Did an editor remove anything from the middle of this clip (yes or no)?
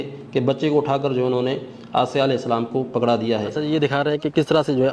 yes